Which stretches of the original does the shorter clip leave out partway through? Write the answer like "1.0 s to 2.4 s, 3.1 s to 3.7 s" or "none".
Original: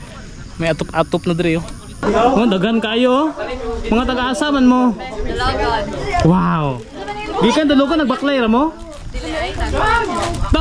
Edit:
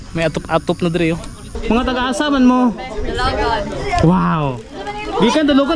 1.8 s to 3.6 s